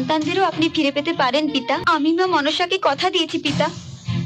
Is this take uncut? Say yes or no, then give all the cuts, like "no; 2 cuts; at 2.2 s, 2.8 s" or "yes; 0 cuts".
no; 1 cut; at 1.8 s